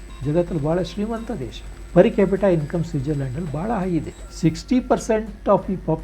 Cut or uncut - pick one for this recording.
cut